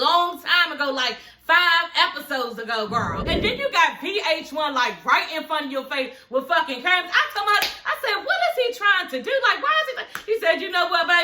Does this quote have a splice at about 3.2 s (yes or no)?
yes